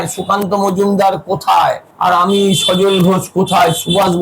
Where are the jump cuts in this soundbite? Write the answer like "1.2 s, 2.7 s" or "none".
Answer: 1.9 s

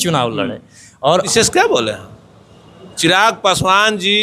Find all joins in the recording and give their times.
1.3 s

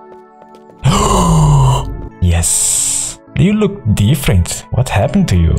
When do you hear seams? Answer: none

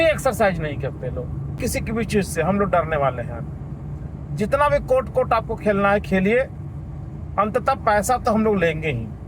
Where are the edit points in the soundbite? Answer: 1.6 s

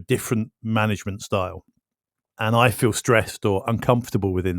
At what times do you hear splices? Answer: 2.3 s

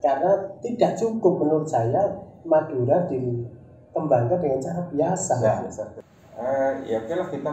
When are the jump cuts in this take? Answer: 5.9 s

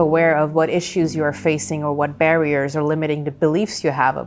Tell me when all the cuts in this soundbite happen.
none

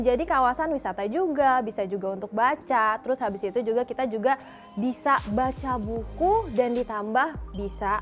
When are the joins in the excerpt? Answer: none

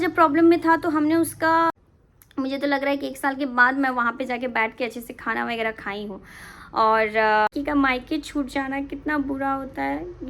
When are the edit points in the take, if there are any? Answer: 1.7 s, 7.5 s

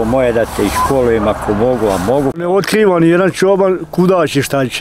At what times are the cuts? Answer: 2.4 s

